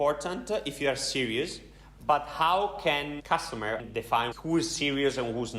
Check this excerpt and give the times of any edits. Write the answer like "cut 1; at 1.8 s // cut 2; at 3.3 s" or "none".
cut 1; at 4.3 s